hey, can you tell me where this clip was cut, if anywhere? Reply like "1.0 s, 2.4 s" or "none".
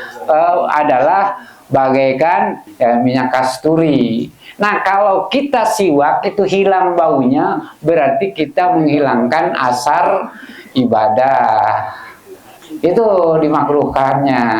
2.6 s